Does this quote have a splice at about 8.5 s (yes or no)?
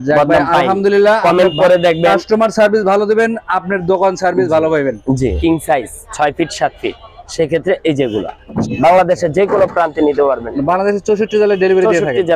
yes